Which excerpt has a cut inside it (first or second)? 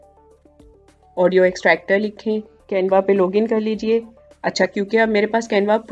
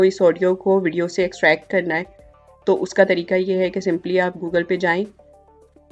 first